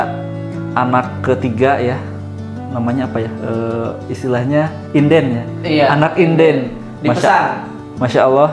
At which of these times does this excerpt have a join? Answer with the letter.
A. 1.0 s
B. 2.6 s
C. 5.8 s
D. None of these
D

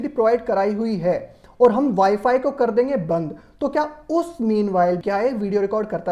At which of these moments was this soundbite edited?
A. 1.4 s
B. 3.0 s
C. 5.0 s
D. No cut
C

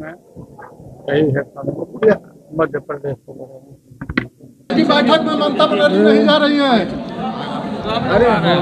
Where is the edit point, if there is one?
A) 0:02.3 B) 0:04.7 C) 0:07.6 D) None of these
B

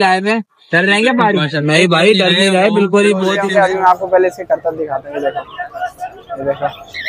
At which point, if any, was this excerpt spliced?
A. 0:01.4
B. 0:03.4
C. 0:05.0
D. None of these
B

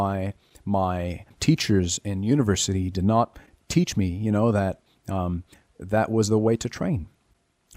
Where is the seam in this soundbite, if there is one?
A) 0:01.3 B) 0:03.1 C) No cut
A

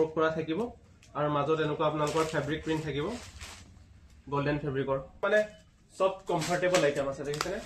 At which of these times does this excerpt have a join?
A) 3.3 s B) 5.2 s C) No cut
B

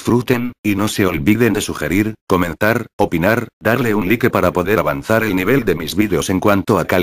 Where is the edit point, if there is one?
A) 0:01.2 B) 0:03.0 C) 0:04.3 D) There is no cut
D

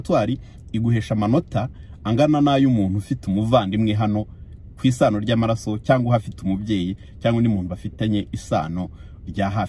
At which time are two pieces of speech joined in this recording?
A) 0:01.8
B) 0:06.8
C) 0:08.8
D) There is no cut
D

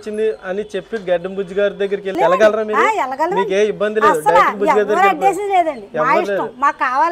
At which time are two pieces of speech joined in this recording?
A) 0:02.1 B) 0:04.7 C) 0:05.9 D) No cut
A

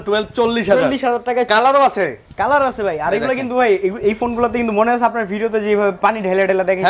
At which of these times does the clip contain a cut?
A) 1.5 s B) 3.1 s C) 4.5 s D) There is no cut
A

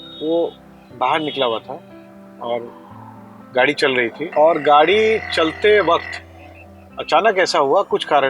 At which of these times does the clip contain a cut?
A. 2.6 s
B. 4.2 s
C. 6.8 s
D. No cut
B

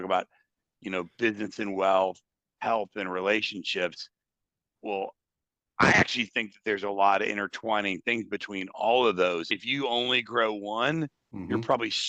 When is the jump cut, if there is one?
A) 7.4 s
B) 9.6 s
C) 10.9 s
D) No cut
B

